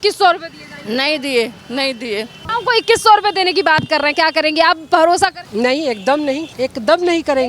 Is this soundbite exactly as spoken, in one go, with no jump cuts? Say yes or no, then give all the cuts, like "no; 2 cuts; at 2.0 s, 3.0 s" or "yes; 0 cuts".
no; 3 cuts; at 2.4 s, 5.4 s, 6.5 s